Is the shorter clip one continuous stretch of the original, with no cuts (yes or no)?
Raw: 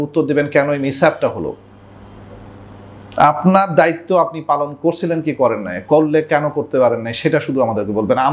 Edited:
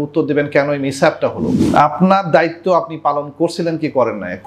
no